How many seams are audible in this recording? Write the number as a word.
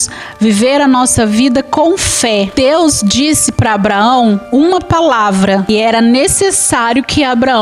two